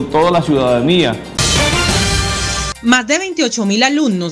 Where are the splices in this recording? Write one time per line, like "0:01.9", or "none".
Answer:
0:01.3
0:02.7